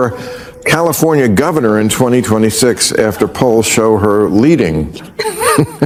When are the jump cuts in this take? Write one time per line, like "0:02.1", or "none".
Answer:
none